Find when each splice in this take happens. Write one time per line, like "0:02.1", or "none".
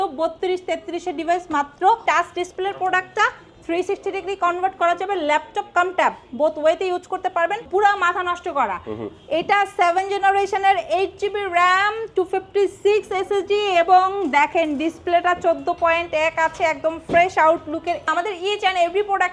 0:02.0
0:07.7
0:18.1

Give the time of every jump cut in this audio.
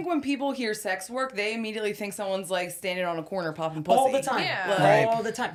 none

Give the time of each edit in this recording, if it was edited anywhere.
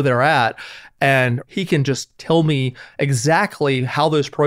0:01.4

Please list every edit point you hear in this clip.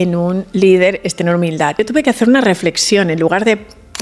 0:01.8

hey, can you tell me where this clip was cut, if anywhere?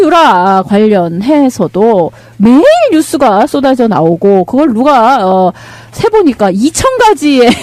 none

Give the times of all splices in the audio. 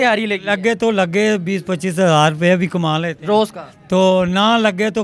none

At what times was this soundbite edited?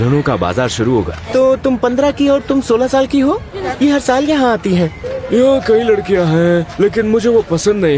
0:01.2
0:03.6
0:05.1

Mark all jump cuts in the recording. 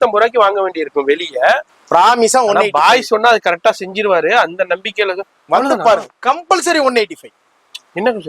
0:01.7

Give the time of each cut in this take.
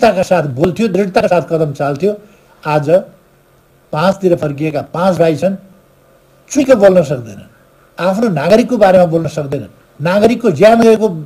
none

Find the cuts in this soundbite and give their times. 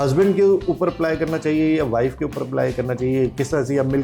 none

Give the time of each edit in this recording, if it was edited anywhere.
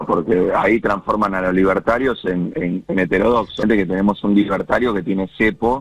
0:03.6

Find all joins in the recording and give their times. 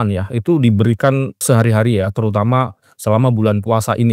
0:01.4

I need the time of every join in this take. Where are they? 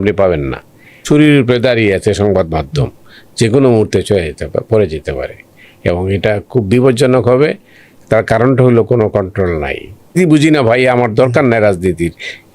0:01.0
0:10.2

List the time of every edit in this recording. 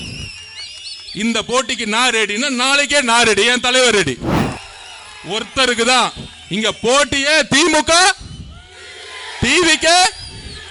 0:04.4

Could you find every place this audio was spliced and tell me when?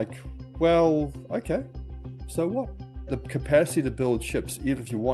0:03.2

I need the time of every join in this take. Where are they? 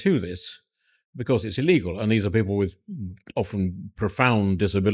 none

